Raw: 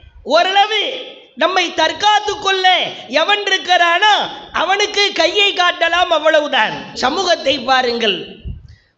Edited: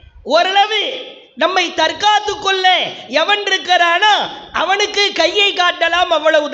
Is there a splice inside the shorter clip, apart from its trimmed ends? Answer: no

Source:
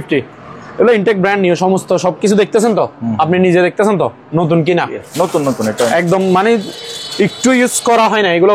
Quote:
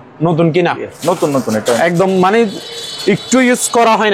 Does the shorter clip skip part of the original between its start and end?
no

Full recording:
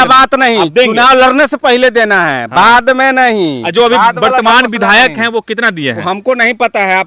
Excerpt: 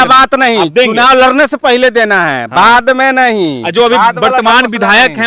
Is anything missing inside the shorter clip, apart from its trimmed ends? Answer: no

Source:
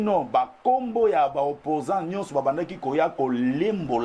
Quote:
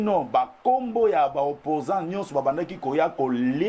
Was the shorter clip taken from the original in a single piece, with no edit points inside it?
yes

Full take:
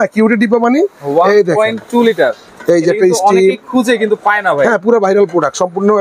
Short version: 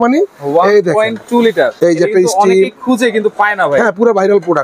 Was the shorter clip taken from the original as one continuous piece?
no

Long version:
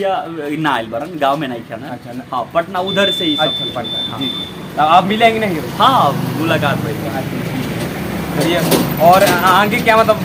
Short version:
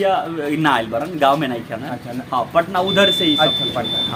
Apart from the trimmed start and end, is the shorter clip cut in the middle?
no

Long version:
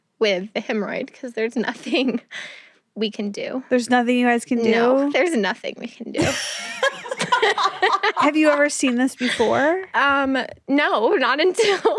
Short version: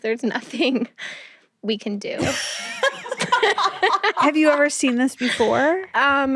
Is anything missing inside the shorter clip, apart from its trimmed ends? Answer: yes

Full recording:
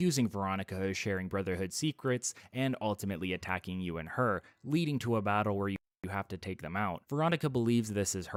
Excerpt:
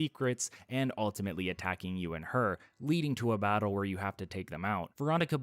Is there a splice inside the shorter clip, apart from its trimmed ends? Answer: yes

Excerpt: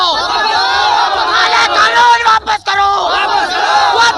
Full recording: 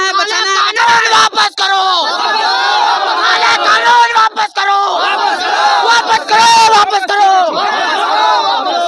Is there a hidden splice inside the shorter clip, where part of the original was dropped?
no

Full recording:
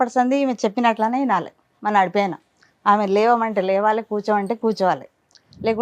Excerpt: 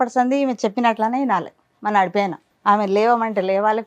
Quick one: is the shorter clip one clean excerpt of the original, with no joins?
no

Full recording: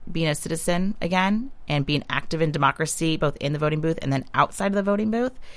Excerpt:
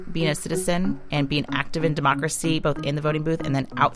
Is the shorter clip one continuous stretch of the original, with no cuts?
no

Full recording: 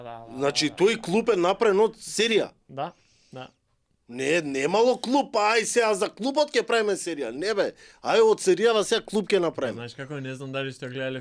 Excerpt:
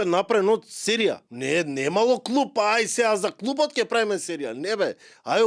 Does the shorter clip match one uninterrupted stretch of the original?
no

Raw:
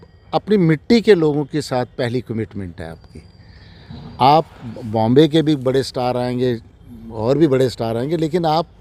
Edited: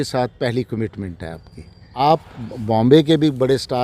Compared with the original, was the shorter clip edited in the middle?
yes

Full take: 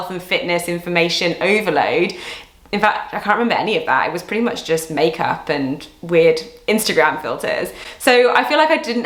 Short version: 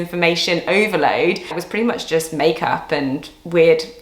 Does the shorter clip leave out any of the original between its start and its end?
yes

